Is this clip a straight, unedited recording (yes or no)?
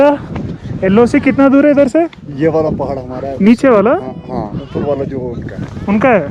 no